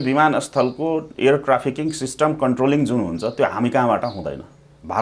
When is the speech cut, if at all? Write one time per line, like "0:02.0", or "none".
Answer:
none